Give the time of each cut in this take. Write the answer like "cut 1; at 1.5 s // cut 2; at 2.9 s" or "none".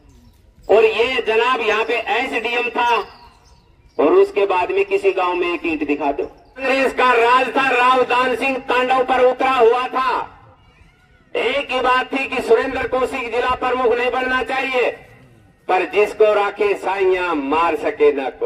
cut 1; at 6.6 s